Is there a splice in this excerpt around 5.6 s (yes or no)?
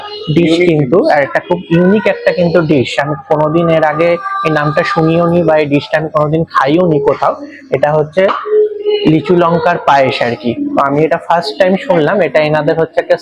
no